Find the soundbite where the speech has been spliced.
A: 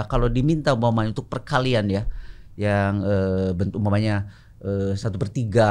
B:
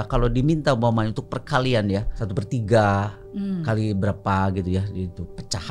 B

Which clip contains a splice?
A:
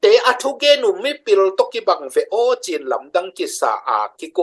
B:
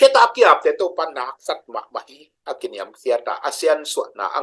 B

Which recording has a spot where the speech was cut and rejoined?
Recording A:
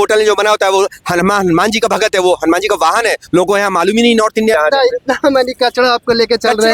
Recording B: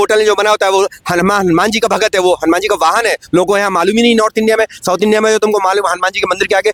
A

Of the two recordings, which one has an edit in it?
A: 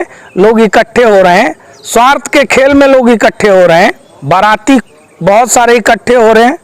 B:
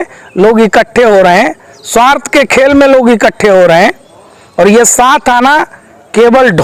A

